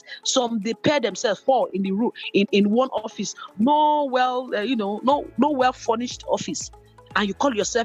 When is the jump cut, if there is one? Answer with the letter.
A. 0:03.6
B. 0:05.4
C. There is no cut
C